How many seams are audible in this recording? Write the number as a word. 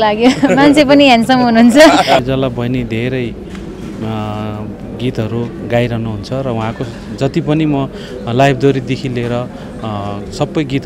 one